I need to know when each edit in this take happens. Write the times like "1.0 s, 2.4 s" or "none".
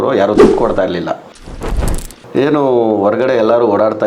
1.7 s